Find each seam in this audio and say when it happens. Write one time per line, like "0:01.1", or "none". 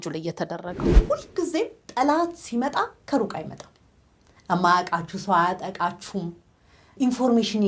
0:01.0